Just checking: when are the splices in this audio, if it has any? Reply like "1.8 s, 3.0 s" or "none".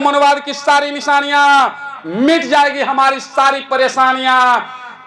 none

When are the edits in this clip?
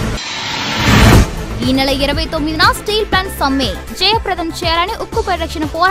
1.1 s

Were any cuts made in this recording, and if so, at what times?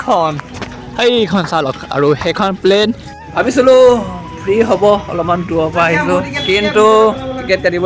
3.1 s

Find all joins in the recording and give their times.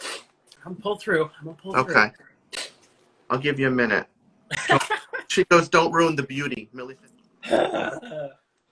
6.6 s

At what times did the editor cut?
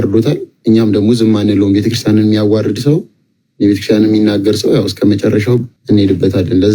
5.7 s

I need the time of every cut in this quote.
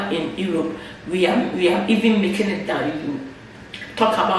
none

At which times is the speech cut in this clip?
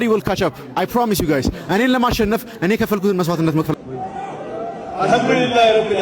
3.7 s

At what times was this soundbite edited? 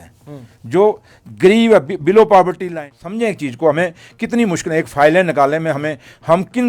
3.0 s

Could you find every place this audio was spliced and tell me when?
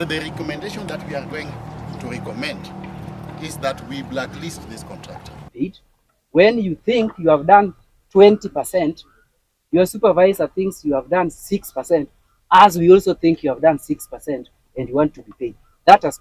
5.4 s

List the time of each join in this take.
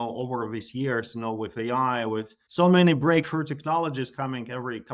2.4 s

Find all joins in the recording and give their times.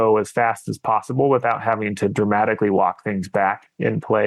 none

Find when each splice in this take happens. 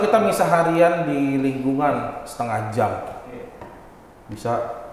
none

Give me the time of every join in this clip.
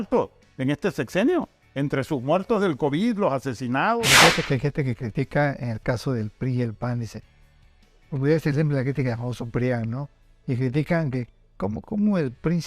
4.0 s

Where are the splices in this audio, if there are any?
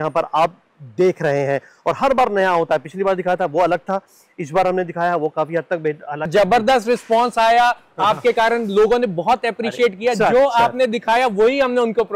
6.3 s

